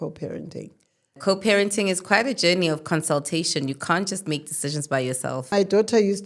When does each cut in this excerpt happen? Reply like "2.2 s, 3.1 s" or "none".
1.2 s, 5.5 s